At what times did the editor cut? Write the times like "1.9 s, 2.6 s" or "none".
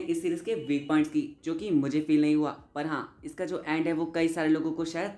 none